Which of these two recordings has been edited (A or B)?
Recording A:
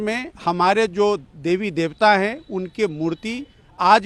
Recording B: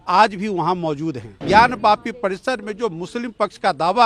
B